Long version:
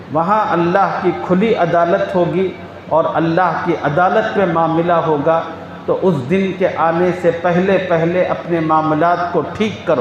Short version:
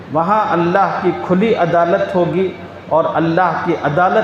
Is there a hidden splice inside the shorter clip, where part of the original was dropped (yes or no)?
no